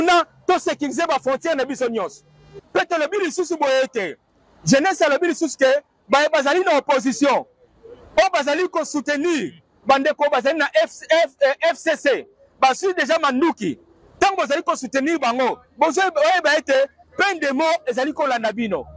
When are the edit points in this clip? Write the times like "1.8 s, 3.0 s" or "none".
2.5 s